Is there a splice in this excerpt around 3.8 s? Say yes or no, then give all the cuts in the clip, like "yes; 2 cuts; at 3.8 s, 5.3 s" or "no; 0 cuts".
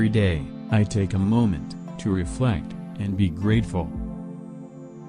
yes; 1 cut; at 3.8 s